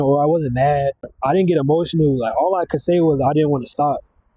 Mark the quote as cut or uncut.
cut